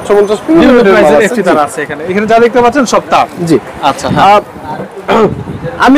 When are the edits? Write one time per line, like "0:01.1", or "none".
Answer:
none